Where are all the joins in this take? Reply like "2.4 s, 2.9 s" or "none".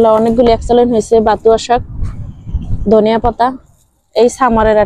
none